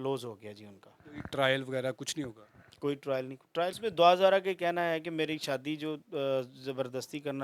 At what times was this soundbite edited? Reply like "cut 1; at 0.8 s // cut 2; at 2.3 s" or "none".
cut 1; at 3.8 s